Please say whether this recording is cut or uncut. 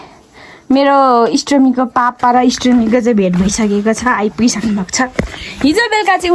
uncut